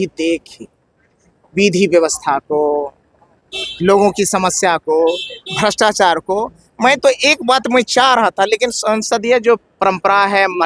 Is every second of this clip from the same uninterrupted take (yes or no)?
yes